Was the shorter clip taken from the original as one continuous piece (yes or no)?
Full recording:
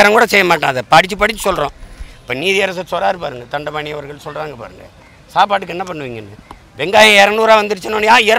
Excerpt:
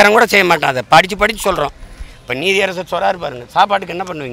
no